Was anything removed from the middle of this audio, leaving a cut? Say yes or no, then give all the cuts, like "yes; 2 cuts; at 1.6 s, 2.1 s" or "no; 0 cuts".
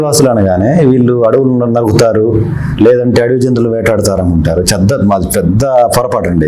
no; 0 cuts